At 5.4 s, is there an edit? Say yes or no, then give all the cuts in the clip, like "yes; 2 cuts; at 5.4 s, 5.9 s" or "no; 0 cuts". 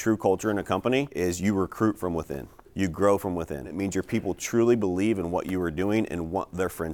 no; 2 cuts; at 1.1 s, 3.8 s